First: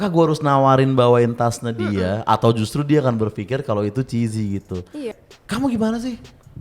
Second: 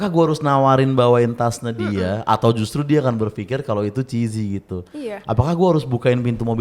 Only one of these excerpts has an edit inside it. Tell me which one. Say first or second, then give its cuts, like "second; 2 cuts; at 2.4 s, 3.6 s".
first; 1 cut; at 5.1 s